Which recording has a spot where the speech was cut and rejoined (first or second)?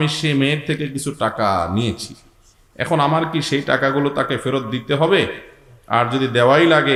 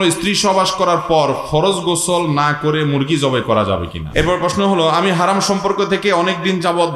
second